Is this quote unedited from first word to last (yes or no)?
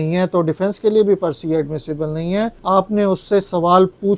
no